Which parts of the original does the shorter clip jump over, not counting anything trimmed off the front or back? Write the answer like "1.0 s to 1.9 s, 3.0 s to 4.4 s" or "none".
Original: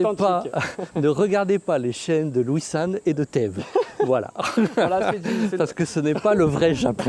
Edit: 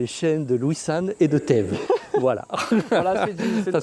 none